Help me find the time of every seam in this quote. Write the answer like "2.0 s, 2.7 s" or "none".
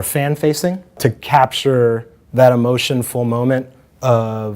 1.0 s